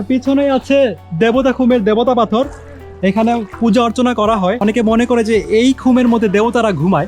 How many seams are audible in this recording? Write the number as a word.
one